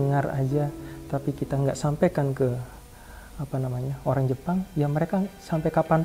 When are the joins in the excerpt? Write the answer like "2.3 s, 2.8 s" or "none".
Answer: none